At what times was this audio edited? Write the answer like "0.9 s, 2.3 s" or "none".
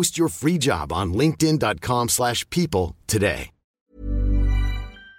3.6 s